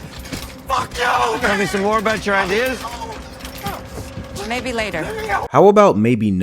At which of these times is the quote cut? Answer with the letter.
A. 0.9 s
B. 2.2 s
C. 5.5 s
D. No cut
C